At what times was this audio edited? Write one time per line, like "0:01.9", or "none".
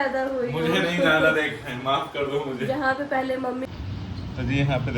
0:03.6